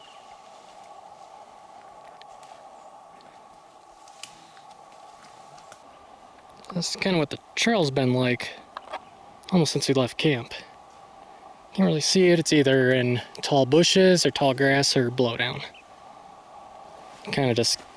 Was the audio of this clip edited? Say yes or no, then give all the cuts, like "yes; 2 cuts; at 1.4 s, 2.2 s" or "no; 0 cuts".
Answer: yes; 1 cut; at 5.8 s